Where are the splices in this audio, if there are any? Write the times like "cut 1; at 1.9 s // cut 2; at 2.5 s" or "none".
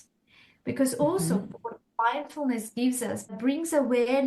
cut 1; at 3.2 s